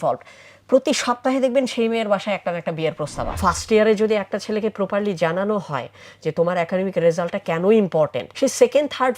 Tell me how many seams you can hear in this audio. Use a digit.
2